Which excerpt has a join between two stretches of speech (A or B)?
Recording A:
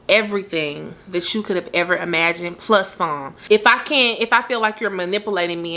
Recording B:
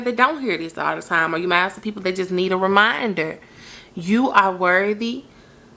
A